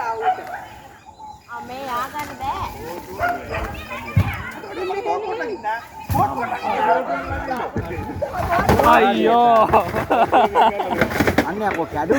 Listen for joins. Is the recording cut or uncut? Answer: uncut